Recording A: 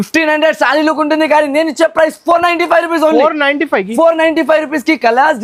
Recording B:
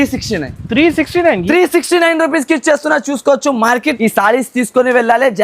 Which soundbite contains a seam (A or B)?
B